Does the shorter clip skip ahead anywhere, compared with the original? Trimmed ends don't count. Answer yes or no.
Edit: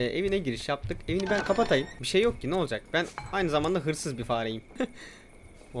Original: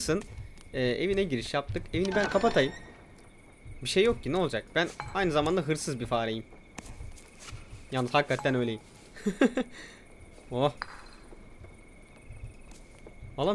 yes